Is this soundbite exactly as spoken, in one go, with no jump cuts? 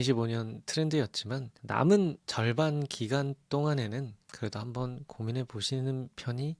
yes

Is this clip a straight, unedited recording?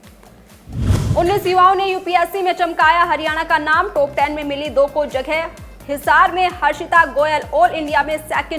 no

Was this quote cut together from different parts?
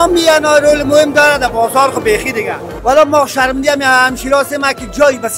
yes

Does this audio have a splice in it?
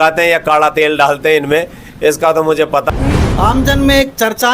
yes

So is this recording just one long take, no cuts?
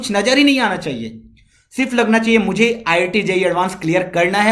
yes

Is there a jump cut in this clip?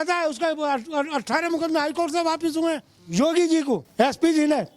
yes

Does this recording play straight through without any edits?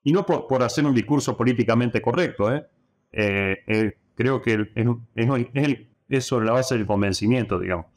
no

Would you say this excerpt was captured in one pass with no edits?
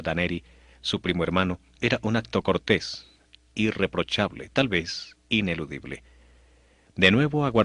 no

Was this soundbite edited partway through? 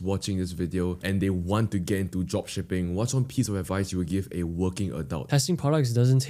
yes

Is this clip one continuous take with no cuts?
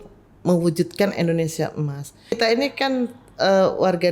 no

